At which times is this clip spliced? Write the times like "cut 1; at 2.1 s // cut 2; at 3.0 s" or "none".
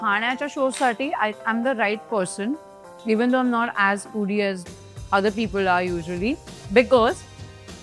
cut 1; at 6.5 s